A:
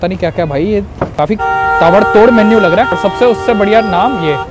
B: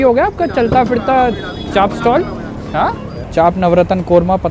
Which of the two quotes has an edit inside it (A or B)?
A